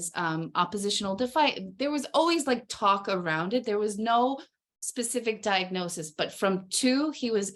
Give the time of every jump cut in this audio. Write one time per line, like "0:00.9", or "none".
none